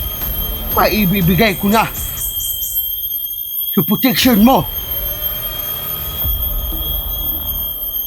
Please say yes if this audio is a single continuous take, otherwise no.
no